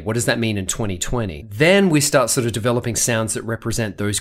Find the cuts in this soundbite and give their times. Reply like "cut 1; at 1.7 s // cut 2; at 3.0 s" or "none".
cut 1; at 1.4 s